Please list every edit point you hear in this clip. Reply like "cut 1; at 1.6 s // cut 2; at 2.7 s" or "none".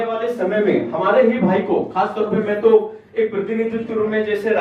none